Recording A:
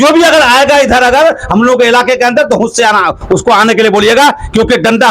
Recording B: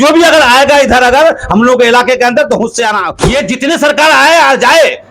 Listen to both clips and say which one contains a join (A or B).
B